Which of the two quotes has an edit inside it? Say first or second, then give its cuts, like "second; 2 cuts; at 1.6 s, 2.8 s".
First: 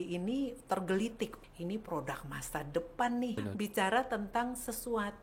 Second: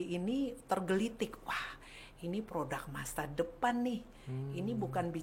first; 2 cuts; at 1.4 s, 3.4 s